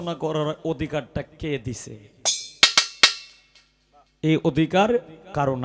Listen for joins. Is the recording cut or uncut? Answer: uncut